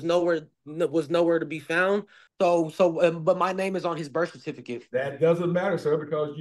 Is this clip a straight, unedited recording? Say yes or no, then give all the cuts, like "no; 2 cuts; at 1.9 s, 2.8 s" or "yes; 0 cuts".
no; 1 cut; at 2.2 s